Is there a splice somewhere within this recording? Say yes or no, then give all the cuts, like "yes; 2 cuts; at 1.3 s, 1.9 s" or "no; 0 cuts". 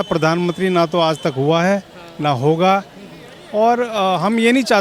no; 0 cuts